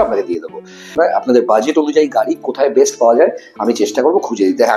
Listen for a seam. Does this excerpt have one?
yes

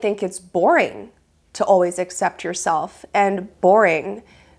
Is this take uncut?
yes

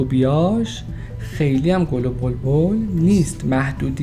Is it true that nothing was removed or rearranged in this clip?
yes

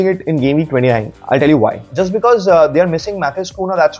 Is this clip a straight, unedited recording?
no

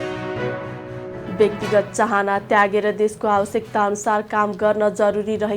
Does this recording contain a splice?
yes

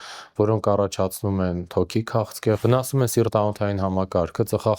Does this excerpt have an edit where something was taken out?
yes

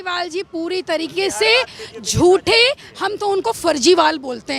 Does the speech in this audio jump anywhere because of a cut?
no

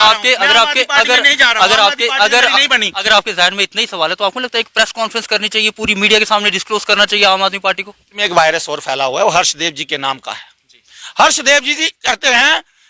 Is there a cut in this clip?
yes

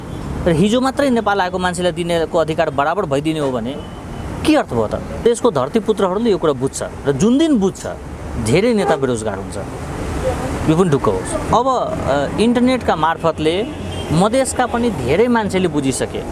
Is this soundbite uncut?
no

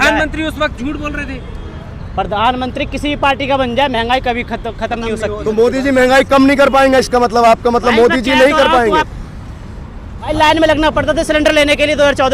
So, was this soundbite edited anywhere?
yes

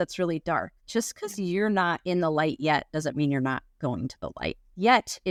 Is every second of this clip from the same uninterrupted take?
yes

